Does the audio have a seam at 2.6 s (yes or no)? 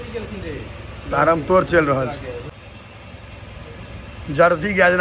yes